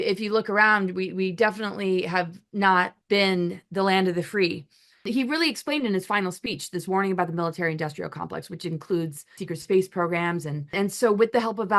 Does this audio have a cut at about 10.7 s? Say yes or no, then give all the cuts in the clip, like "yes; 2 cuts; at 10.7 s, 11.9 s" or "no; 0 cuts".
yes; 4 cuts; at 3.0 s, 5.1 s, 9.4 s, 10.7 s